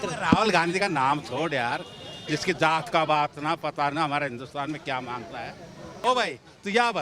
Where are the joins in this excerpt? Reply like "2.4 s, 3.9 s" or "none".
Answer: 5.9 s